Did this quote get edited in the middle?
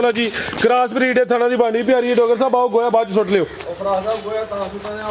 no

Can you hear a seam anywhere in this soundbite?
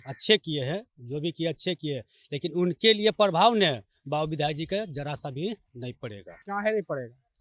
no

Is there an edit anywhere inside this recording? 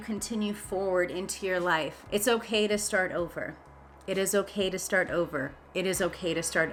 no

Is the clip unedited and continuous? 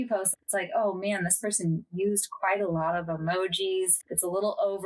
yes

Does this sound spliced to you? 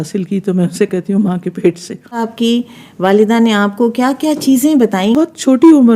yes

